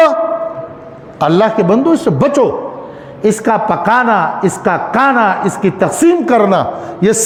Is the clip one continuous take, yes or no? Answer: yes